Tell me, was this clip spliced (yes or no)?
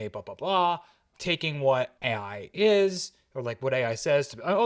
no